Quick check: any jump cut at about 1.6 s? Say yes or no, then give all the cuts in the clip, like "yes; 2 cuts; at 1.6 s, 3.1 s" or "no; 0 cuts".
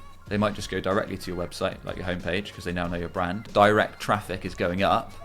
no; 1 cut; at 3.5 s